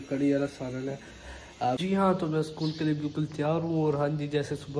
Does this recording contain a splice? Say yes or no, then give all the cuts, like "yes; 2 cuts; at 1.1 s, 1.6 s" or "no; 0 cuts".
yes; 1 cut; at 1.8 s